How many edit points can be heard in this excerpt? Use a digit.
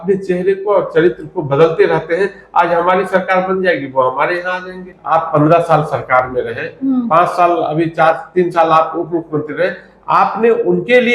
1